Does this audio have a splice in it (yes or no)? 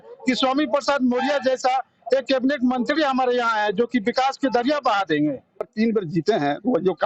yes